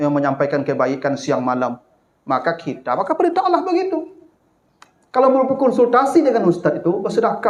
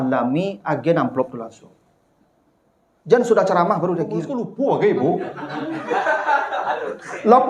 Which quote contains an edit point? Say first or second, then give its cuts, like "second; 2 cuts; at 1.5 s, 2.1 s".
second; 1 cut; at 4.4 s